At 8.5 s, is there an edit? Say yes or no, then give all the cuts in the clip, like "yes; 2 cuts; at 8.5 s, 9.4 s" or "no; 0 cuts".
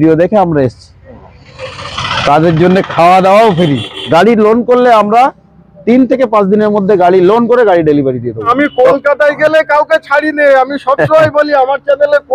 yes; 2 cuts; at 4.1 s, 8.5 s